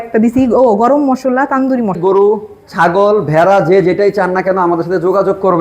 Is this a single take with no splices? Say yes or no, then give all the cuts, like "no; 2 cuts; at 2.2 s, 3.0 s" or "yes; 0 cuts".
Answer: no; 1 cut; at 2.0 s